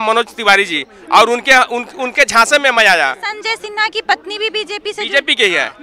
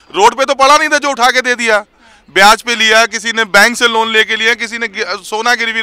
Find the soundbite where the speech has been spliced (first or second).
first